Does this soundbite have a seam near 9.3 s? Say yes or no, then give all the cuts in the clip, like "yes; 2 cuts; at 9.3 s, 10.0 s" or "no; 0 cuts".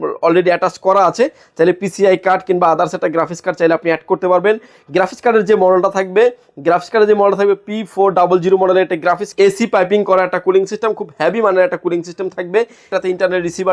yes; 2 cuts; at 9.3 s, 12.9 s